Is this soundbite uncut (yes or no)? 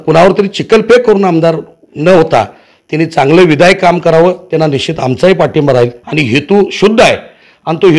no